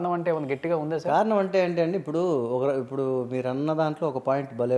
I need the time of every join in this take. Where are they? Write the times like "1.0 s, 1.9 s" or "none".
none